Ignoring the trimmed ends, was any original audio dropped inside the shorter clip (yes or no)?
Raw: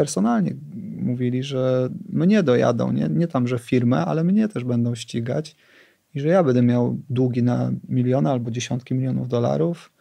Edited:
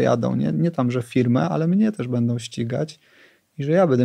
no